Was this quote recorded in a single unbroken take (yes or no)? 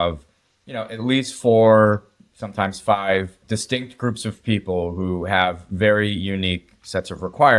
no